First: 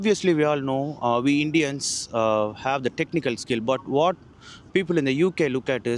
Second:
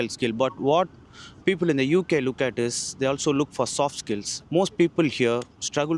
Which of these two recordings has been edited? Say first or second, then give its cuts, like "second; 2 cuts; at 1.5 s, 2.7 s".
second; 1 cut; at 4.3 s